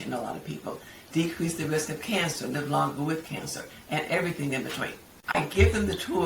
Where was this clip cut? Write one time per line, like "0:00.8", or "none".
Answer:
0:05.4